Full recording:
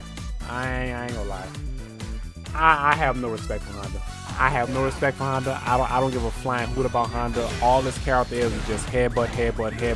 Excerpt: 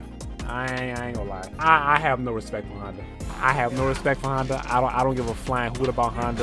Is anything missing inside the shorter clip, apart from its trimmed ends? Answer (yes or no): yes